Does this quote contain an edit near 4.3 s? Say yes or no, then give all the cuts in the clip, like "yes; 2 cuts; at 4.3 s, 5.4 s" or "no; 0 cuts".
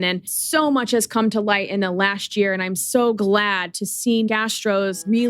yes; 1 cut; at 4.3 s